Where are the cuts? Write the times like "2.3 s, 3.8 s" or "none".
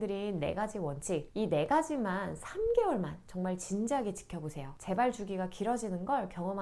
1.3 s